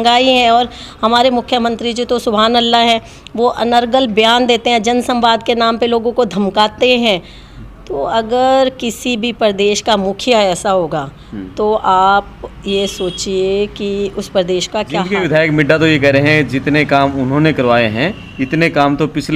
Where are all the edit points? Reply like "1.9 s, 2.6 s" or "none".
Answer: 15.1 s